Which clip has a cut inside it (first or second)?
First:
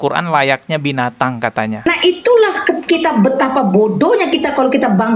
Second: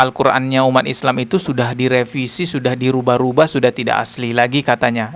first